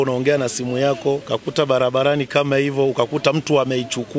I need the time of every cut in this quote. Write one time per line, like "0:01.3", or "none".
0:01.2